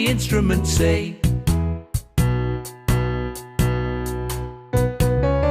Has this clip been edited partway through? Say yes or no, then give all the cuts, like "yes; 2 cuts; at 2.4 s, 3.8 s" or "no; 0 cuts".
yes; 1 cut; at 1.1 s